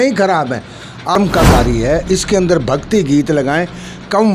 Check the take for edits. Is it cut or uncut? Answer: cut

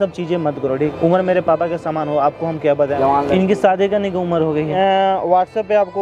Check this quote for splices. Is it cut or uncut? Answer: cut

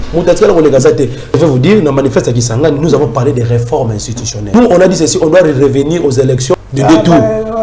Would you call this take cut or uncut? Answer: cut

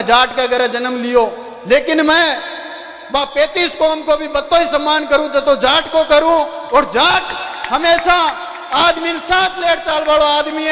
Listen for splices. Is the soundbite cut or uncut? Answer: uncut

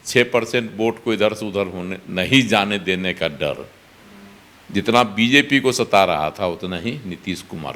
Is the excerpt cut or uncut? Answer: uncut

